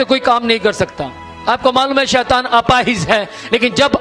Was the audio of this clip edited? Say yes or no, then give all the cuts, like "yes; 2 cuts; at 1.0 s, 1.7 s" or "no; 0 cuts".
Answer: no; 0 cuts